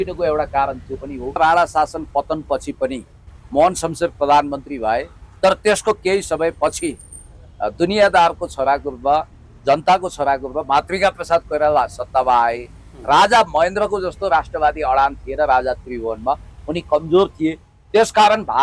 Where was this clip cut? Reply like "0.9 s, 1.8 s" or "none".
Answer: 1.4 s